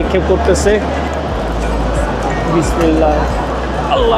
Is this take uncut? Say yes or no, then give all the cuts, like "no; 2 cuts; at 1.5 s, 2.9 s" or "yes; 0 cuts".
no; 1 cut; at 1.1 s